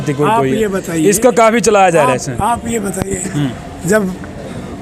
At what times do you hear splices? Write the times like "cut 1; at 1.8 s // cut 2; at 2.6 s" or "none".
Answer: none